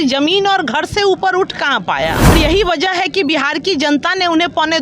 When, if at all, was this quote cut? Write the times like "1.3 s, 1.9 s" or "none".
2.3 s